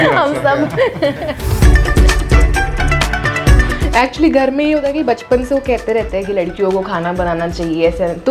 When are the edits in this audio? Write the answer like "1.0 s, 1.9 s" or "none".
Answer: 1.6 s, 3.8 s